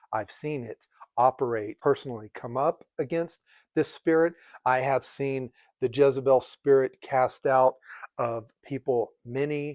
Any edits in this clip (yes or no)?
yes